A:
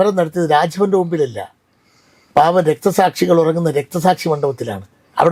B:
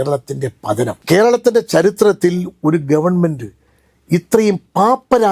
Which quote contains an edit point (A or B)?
B